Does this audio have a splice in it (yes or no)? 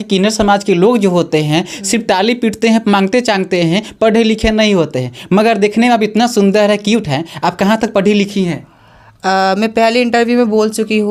no